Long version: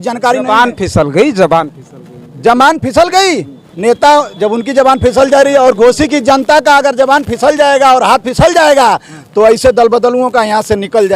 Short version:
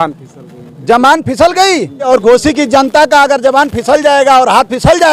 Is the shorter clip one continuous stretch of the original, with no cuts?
no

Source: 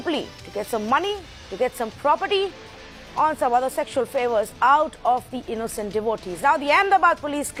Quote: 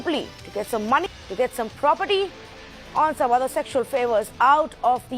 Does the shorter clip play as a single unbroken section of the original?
no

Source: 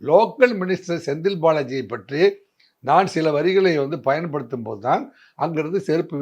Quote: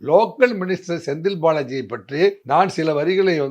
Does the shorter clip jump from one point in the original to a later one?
yes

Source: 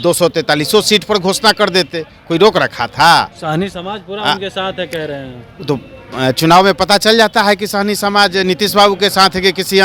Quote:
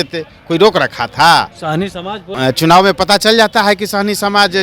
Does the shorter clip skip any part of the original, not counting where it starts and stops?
yes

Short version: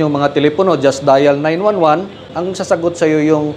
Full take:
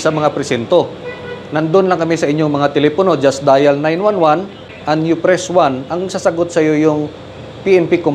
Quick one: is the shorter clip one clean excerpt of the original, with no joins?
no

